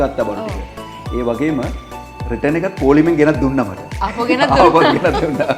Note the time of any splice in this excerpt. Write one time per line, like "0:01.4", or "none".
none